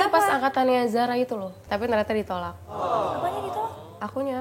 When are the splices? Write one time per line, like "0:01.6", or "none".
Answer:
0:01.5

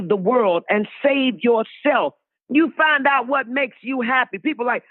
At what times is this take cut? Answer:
0:02.2

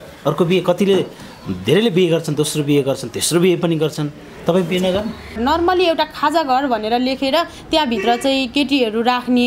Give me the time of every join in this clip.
0:05.4

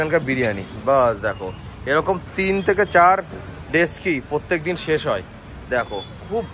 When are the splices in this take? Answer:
none

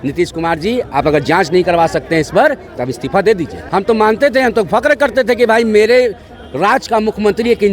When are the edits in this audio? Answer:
0:03.5

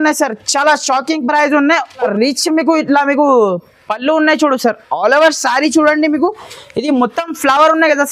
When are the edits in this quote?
0:02.0

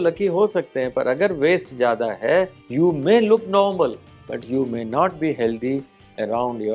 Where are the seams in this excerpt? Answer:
0:02.6

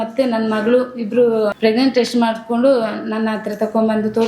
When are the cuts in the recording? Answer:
0:01.5

